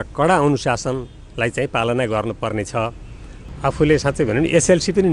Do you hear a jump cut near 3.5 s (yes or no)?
yes